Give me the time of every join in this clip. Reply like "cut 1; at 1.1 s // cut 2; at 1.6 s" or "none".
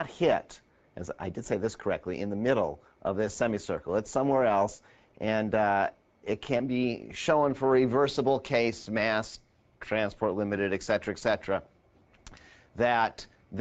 cut 1; at 9.8 s